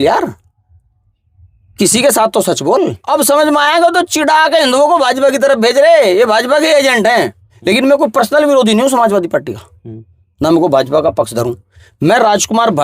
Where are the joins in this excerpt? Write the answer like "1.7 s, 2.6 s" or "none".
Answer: 3.0 s, 7.5 s